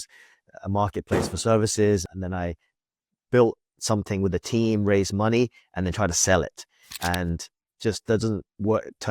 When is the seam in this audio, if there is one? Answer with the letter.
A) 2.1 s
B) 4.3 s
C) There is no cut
A